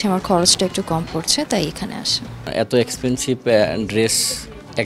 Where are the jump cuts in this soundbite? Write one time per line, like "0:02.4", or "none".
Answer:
0:02.5